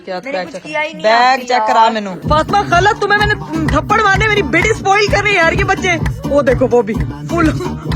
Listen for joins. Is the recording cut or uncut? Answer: cut